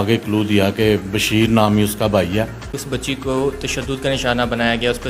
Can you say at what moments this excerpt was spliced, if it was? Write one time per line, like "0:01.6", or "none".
0:02.9